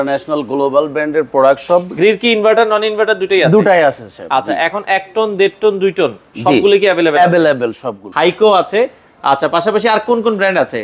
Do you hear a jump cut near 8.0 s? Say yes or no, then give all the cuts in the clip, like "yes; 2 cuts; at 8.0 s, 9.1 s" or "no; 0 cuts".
yes; 2 cuts; at 1.9 s, 8.0 s